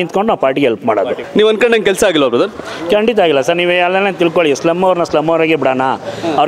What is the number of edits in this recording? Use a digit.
1